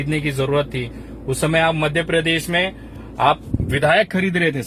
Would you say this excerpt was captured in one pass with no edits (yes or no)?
yes